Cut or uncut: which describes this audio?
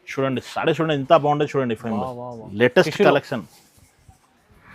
cut